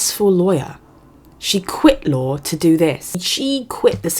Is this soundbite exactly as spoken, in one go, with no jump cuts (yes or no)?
no